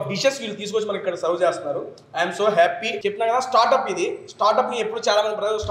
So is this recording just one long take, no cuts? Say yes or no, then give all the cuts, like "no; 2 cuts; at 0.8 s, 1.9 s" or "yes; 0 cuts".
no; 1 cut; at 2.9 s